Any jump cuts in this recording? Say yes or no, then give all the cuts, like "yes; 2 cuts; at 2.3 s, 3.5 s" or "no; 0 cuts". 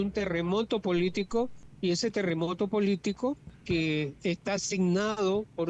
yes; 2 cuts; at 1.6 s, 3.5 s